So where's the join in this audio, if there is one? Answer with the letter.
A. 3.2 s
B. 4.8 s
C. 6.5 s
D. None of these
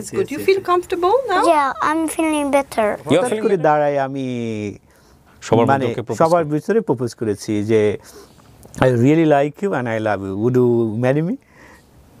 A